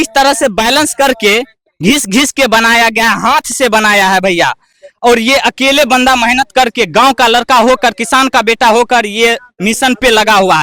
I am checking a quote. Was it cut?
no; 0 cuts

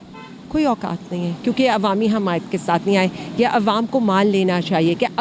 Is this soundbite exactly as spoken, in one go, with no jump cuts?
yes; 0 cuts

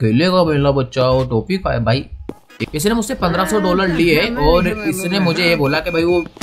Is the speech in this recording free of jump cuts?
no; 1 cut; at 2.5 s

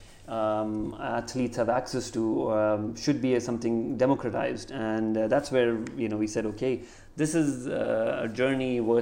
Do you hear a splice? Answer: no; 0 cuts

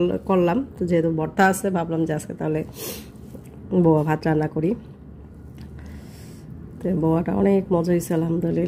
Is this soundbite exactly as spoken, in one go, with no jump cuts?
yes; 0 cuts

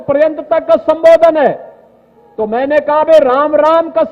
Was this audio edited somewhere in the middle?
no; 0 cuts

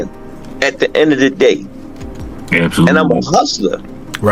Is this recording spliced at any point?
no; 0 cuts

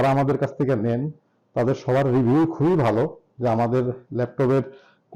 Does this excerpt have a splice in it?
no; 0 cuts

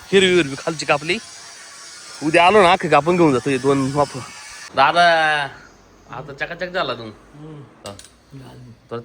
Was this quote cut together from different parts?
yes; 2 cuts; at 4.7 s, 7.8 s

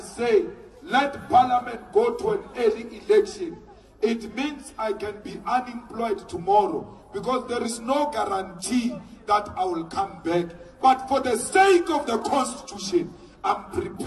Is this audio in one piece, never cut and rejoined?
yes; 0 cuts

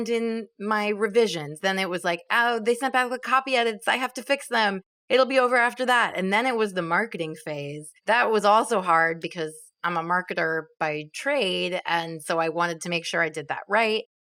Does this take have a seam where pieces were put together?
no; 0 cuts

